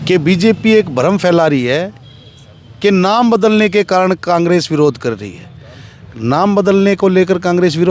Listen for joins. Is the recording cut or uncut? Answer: uncut